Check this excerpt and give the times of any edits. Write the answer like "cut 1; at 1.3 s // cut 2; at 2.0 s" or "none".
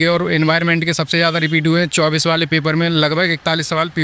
none